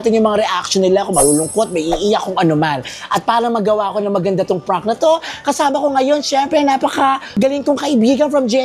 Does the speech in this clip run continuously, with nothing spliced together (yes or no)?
yes